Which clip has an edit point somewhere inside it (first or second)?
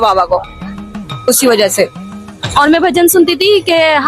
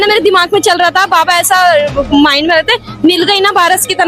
first